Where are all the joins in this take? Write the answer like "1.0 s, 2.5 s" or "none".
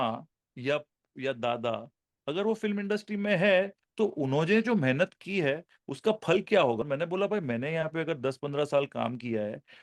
6.8 s